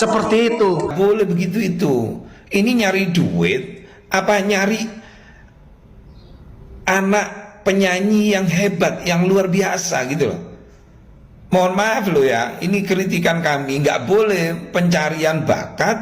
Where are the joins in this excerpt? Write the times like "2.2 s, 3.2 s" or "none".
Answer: 0.9 s